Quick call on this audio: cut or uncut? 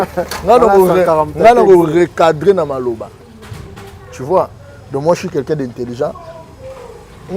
uncut